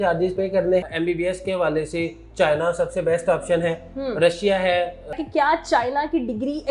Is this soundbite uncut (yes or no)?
no